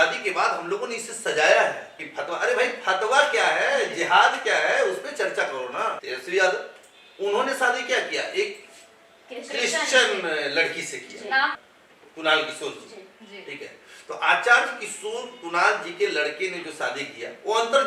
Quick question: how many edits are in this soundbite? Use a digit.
3